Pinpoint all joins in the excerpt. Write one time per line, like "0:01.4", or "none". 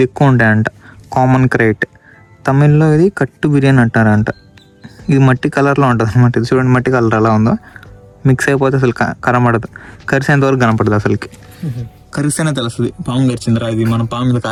none